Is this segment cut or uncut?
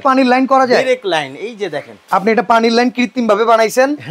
cut